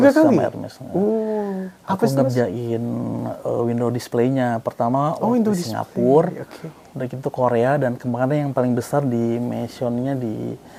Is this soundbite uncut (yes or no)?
yes